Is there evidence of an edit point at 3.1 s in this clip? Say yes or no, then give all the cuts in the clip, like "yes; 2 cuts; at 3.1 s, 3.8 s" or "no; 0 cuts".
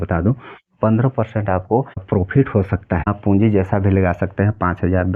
yes; 2 cuts; at 2.0 s, 3.1 s